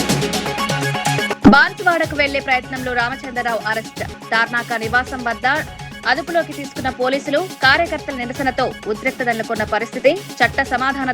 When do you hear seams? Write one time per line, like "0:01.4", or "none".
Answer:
0:01.3